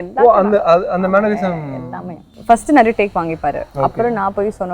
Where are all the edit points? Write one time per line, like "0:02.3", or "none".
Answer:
0:02.3